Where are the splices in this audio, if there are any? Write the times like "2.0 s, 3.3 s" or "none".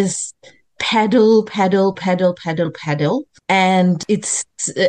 4.0 s